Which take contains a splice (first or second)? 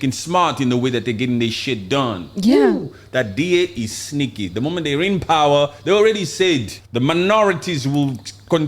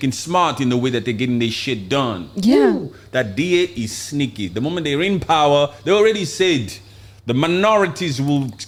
first